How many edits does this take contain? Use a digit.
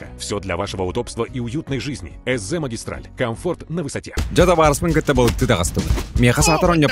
1